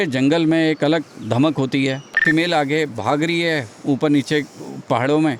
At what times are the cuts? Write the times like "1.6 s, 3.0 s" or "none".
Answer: 2.2 s